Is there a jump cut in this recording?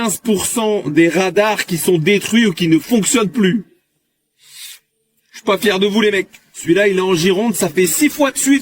no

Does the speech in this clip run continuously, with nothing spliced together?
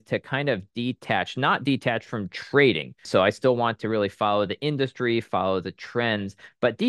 no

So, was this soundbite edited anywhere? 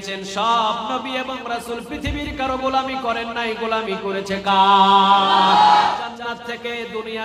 yes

